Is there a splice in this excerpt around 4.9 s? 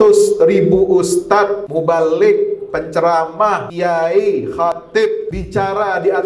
yes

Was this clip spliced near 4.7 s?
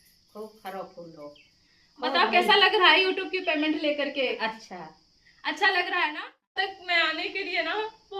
no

